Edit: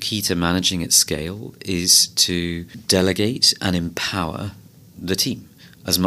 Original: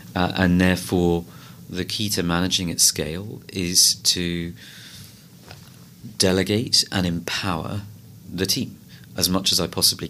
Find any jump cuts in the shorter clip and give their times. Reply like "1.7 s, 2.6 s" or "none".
2.7 s